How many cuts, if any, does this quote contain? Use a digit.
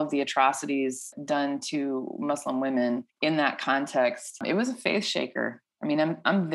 3